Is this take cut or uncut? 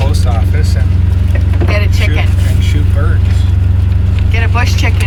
uncut